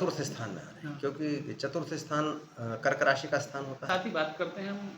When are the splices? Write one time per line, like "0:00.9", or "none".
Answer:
0:03.9